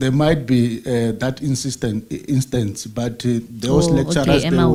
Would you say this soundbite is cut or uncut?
uncut